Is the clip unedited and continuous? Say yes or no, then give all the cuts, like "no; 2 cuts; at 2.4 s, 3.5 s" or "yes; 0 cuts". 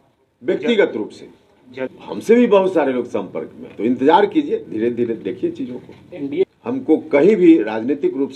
no; 2 cuts; at 1.9 s, 6.4 s